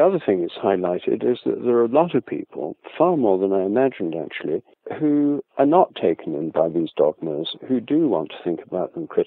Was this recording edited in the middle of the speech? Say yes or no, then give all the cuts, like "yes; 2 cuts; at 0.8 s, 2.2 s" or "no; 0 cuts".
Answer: no; 0 cuts